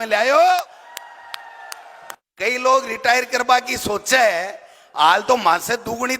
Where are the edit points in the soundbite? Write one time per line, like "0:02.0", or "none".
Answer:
0:02.5